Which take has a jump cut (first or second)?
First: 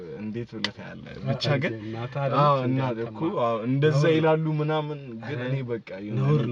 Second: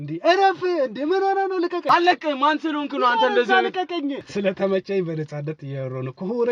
second